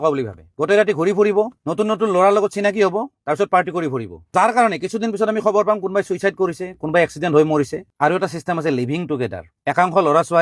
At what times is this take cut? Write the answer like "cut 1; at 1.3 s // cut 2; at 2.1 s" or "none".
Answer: cut 1; at 7.8 s